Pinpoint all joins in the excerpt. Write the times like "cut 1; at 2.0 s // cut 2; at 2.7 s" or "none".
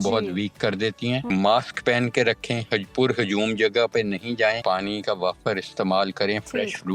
cut 1; at 1.3 s // cut 2; at 4.6 s